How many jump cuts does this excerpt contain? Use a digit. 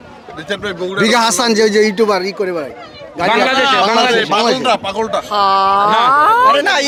0